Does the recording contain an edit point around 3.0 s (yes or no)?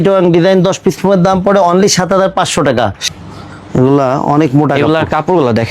yes